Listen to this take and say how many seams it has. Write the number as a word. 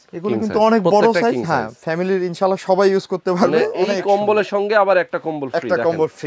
one